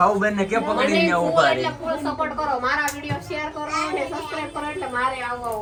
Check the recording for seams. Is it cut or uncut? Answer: uncut